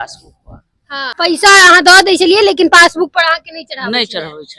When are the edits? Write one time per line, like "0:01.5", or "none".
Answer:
0:01.1